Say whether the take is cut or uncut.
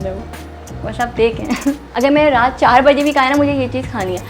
cut